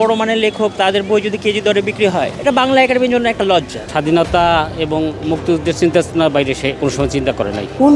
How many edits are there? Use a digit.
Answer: 3